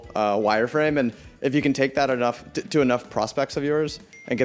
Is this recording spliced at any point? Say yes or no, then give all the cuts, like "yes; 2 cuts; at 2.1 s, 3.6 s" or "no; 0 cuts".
no; 0 cuts